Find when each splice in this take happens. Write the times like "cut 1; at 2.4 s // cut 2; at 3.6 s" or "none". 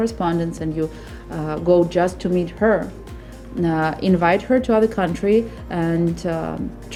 none